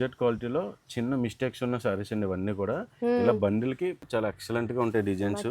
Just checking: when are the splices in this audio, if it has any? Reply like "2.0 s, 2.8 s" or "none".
4.0 s